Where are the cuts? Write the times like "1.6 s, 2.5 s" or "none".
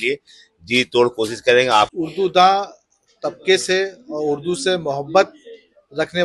1.9 s